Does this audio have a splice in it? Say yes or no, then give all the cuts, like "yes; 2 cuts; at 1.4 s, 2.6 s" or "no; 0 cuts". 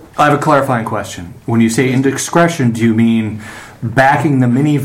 no; 0 cuts